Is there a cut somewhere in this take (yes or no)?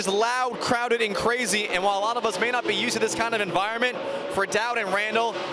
no